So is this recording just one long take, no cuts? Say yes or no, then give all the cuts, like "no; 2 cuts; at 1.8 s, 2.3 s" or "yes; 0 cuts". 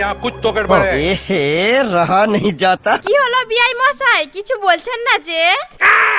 yes; 0 cuts